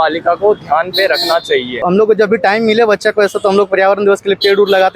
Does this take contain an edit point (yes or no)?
yes